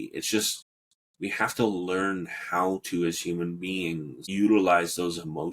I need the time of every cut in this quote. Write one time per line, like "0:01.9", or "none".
0:04.2

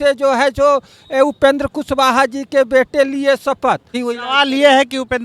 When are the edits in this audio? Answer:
0:04.0

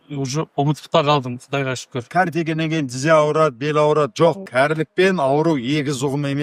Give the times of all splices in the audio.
0:02.1
0:04.4

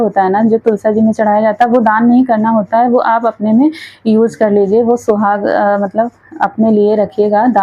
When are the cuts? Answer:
none

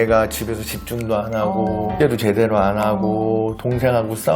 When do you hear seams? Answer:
0:01.9

